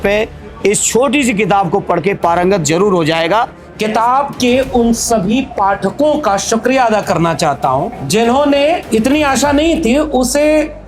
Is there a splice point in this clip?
yes; 3 cuts; at 3.6 s, 8.0 s, 8.8 s

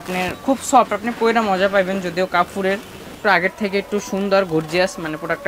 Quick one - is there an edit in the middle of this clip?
yes; 1 cut; at 3.1 s

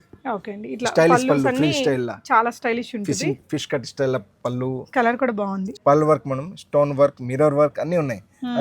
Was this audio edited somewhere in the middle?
yes; 1 cut; at 5.7 s

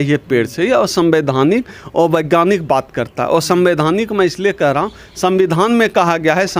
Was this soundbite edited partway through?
no; 0 cuts

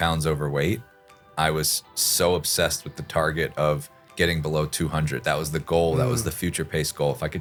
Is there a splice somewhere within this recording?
no; 0 cuts

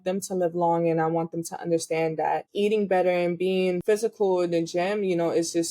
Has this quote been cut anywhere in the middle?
yes; 2 cuts; at 2.5 s, 3.8 s

